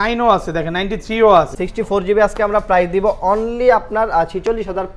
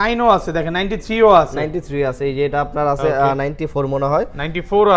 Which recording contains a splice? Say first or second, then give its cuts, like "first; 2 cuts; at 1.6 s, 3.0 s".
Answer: first; 1 cut; at 1.5 s